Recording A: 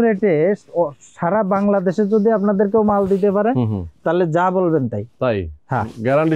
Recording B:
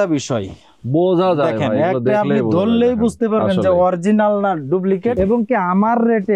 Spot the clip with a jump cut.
B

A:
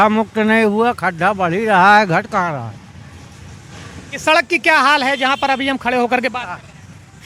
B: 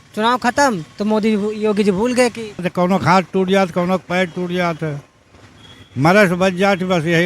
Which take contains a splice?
B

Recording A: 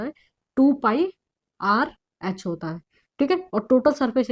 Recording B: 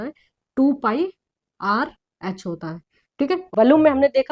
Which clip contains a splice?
B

